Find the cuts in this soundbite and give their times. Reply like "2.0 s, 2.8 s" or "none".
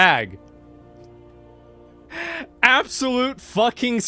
2.1 s